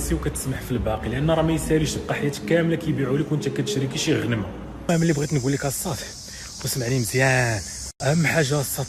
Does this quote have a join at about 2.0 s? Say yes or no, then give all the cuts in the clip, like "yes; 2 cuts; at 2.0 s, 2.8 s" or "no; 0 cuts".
no; 1 cut; at 4.9 s